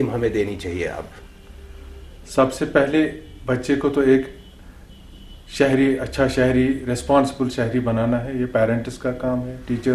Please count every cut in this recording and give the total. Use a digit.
0